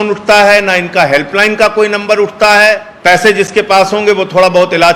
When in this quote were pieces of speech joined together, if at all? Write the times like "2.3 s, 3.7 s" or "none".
2.9 s